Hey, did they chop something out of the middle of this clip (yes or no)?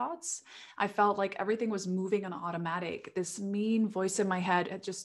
no